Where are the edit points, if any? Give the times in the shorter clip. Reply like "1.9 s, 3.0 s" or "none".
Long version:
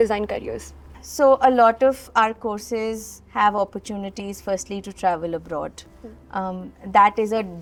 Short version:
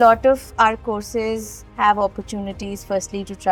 none